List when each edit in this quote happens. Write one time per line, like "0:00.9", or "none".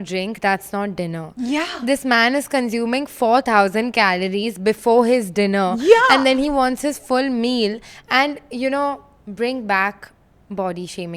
none